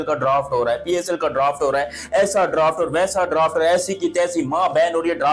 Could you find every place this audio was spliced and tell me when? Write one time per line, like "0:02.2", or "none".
none